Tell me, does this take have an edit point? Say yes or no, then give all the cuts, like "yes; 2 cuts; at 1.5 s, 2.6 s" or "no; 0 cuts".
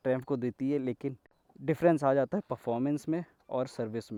no; 0 cuts